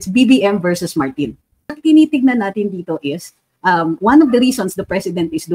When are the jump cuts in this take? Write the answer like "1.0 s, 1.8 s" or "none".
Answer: 1.8 s

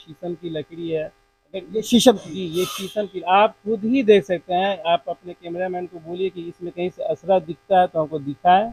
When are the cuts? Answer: none

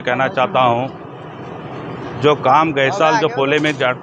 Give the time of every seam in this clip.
none

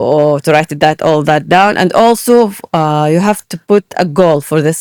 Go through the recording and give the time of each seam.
none

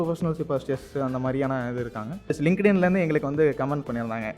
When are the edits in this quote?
2.4 s

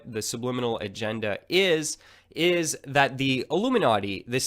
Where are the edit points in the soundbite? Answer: 3.2 s

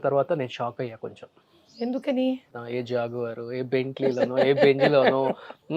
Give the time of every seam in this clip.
2.6 s

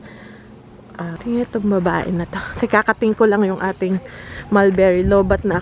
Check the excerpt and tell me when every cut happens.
1.1 s

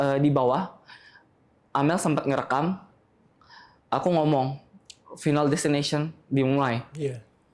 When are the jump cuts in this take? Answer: none

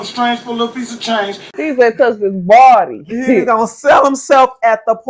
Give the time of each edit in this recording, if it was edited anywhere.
1.5 s

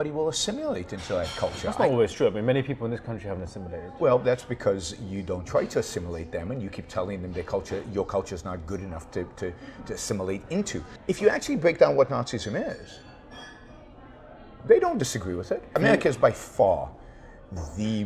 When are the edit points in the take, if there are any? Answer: 10.8 s, 15.8 s

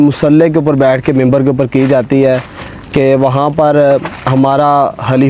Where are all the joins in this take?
none

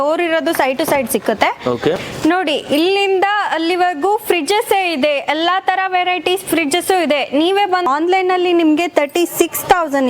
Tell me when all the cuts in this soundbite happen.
2.1 s, 7.8 s

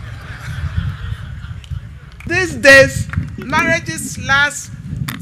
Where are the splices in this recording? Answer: 2.3 s

